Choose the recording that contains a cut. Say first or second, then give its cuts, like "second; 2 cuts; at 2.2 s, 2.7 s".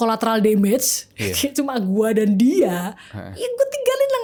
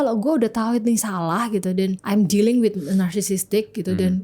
second; 1 cut; at 2.0 s